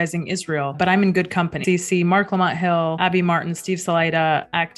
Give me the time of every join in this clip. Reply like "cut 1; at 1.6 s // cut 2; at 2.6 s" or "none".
cut 1; at 1.5 s